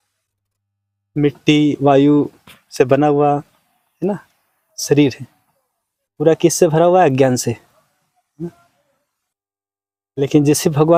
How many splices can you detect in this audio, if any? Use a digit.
0